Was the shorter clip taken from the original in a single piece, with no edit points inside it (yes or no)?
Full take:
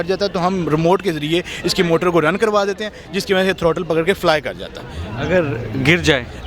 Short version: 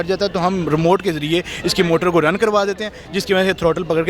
yes